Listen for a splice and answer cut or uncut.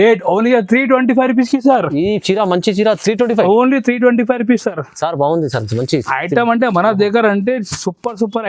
uncut